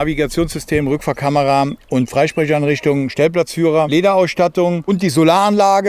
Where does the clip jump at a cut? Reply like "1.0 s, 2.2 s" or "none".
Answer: 3.9 s, 4.9 s